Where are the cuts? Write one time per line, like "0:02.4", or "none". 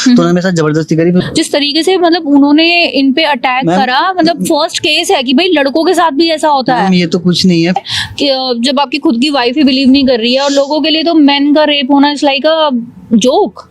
0:01.3
0:07.7